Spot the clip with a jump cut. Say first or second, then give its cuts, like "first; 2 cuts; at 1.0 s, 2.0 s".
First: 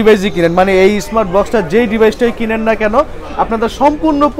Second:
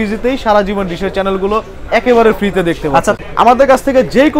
second; 1 cut; at 3.1 s